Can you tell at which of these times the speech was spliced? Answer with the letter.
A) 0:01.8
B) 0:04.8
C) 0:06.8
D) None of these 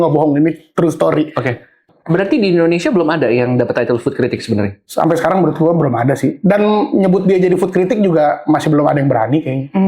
A